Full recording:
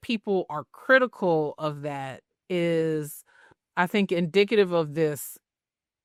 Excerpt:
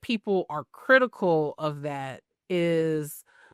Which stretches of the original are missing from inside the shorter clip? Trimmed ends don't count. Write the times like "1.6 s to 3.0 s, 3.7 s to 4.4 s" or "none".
none